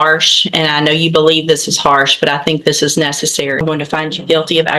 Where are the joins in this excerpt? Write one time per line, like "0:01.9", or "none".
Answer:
0:03.6